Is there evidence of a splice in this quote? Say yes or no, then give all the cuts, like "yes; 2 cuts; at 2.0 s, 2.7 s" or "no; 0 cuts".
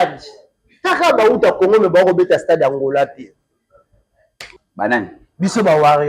yes; 1 cut; at 4.6 s